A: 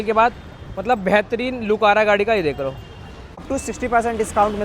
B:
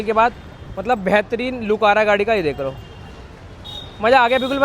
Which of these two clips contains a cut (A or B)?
A